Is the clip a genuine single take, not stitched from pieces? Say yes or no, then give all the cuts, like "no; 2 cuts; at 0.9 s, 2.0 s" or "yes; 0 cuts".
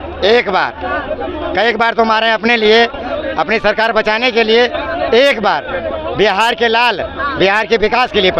yes; 0 cuts